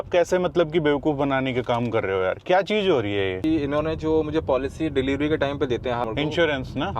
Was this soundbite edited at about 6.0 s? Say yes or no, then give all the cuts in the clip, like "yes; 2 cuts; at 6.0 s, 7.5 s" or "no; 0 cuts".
yes; 2 cuts; at 3.4 s, 6.0 s